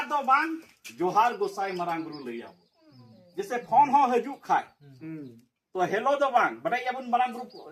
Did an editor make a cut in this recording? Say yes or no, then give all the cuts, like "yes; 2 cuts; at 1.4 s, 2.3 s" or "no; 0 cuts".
no; 0 cuts